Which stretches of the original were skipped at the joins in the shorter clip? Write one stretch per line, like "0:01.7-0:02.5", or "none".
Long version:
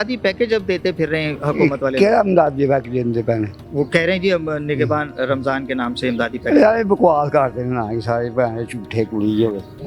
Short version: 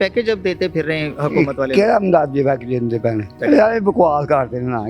0:03.6-0:06.4